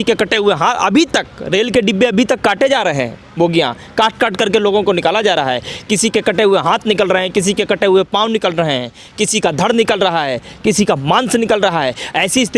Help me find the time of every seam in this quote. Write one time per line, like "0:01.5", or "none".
none